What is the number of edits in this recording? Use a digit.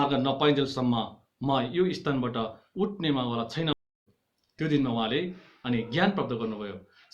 1